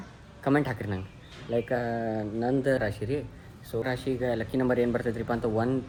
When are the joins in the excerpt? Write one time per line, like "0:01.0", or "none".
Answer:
none